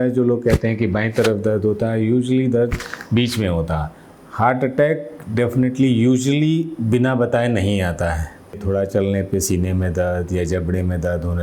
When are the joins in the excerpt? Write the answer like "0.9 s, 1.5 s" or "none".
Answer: 4.0 s, 8.6 s